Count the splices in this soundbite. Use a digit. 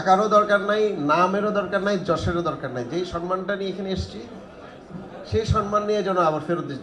0